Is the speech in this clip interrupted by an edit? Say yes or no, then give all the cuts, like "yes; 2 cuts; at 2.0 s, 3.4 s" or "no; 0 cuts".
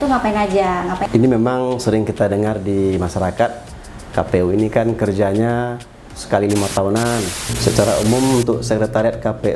yes; 2 cuts; at 1.0 s, 7.4 s